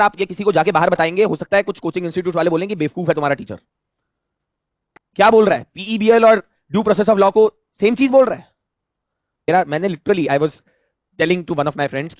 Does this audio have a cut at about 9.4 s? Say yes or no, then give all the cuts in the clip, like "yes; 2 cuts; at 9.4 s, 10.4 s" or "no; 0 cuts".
yes; 1 cut; at 9.4 s